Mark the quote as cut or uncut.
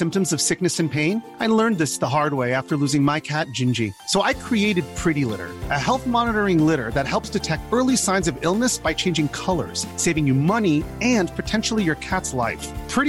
uncut